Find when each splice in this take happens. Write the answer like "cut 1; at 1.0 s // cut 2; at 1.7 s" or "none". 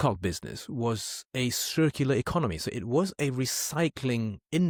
none